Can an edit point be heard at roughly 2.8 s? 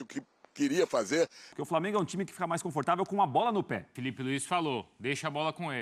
no; 2 cuts; at 1.5 s, 4.0 s

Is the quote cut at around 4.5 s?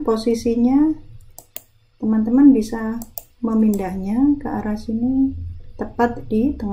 no; 0 cuts

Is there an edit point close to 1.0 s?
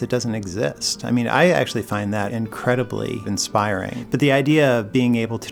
no; 2 cuts; at 2.3 s, 3.7 s

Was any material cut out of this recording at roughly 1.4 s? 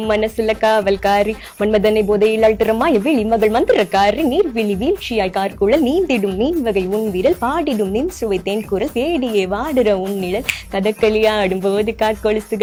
no; 0 cuts

